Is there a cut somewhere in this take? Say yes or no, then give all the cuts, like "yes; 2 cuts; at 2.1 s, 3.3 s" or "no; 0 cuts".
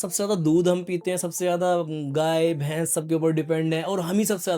no; 0 cuts